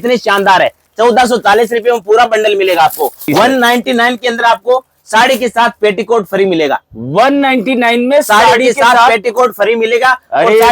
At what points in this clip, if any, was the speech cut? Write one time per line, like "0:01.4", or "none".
0:03.3